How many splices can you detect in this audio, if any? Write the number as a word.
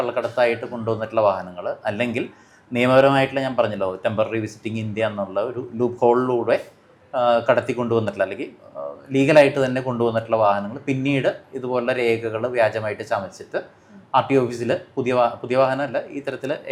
zero